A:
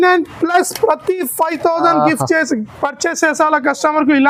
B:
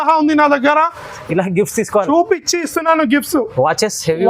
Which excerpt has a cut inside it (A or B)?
B